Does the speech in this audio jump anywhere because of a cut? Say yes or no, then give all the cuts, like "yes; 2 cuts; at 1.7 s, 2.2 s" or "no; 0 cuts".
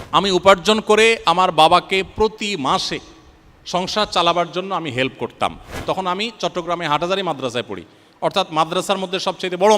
yes; 1 cut; at 5.8 s